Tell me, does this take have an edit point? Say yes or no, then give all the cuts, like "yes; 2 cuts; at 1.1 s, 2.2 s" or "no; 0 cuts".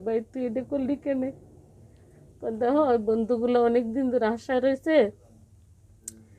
no; 0 cuts